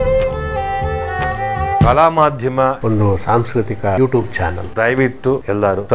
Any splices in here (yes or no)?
no